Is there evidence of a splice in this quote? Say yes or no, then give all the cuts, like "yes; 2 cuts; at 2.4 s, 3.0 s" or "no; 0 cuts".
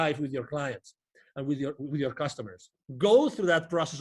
yes; 1 cut; at 2.8 s